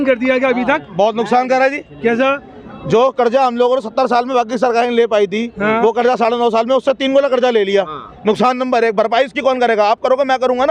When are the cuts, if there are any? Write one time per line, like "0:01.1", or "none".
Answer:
none